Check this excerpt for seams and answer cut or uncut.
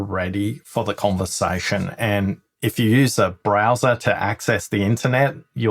uncut